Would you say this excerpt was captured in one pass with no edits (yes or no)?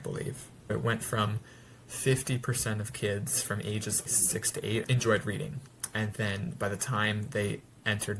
no